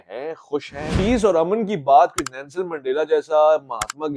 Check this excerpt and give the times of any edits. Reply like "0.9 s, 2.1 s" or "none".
1.0 s